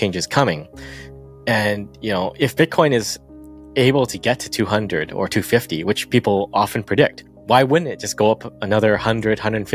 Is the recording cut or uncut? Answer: uncut